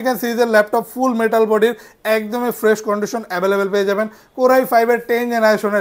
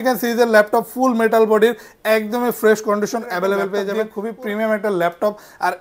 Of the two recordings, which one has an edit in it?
second; 1 cut; at 4.0 s

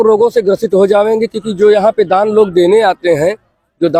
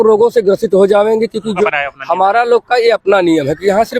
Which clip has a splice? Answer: second; 1 cut; at 1.6 s

